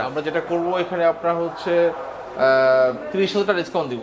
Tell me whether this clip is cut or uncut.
uncut